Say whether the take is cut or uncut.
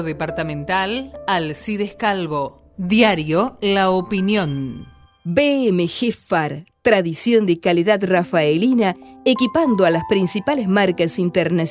cut